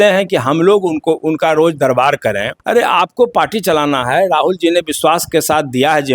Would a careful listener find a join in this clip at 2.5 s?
yes; 1 cut; at 2.5 s

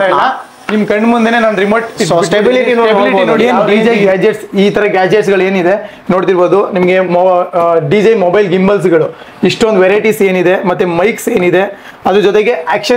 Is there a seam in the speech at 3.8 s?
yes; 1 cut; at 3.8 s

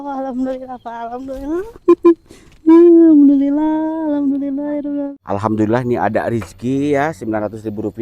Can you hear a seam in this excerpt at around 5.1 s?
yes; 1 cut; at 5.1 s

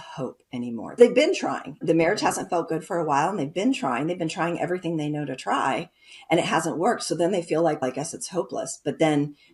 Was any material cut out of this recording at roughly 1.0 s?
yes; 2 cuts; at 1.0 s, 1.8 s

